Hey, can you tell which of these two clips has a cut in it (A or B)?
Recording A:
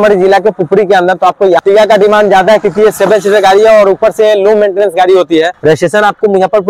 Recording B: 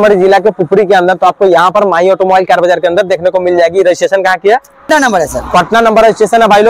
A